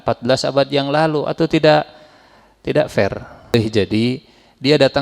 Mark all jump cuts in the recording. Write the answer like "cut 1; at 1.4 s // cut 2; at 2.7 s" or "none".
cut 1; at 3.5 s